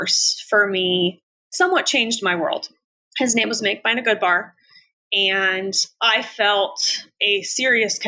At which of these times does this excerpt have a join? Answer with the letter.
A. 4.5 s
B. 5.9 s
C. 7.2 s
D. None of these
B